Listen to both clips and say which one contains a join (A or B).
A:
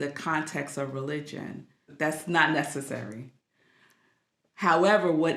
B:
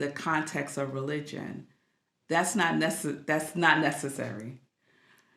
A